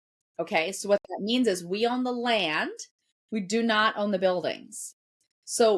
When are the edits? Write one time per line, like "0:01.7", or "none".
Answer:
none

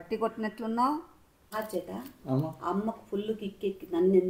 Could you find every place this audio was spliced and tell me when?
0:01.3

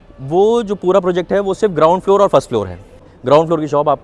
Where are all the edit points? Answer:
0:03.1

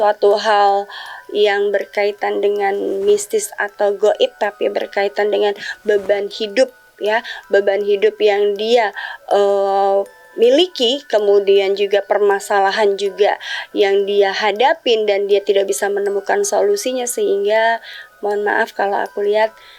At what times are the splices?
none

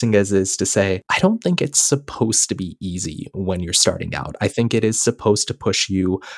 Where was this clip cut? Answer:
0:01.1

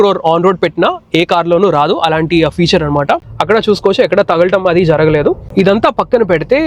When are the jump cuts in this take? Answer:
0:03.2
0:05.5

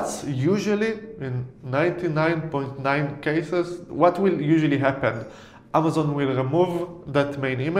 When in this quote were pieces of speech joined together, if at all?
none

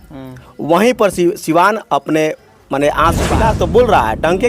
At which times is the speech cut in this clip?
0:03.3

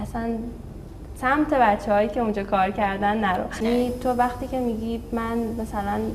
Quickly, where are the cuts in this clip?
0:03.6

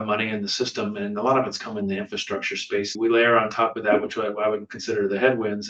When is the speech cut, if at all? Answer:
0:02.9

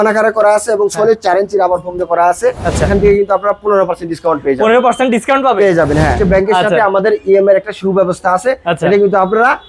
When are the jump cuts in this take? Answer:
0:02.9
0:06.1

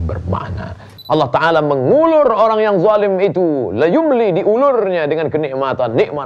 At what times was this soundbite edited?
0:00.9

